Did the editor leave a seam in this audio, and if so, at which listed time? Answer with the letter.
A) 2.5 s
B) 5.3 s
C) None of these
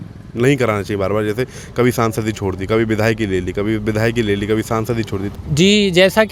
B